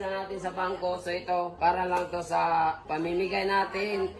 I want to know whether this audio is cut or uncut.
cut